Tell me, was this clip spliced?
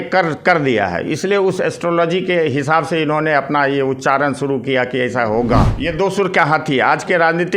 yes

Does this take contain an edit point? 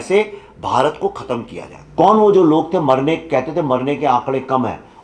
yes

